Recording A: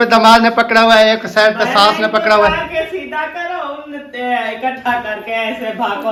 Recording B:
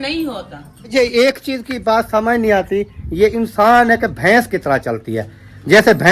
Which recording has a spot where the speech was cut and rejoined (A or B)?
B